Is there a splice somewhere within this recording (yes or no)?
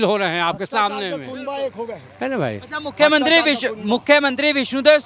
no